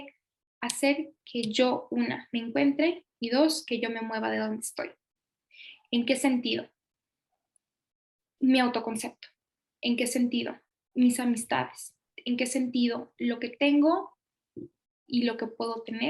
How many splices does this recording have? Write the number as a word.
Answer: zero